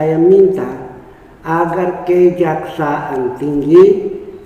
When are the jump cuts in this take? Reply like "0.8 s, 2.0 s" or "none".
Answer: none